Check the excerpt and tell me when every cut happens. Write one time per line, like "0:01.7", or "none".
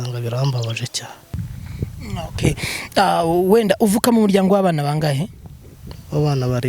0:01.2